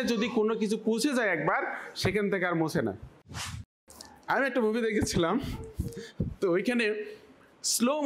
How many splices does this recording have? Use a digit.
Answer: 1